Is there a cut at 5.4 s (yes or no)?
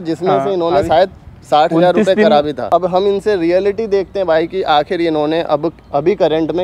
no